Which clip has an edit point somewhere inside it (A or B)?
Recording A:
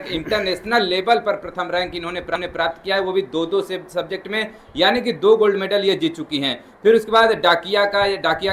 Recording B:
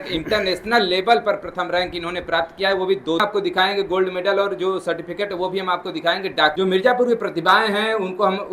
B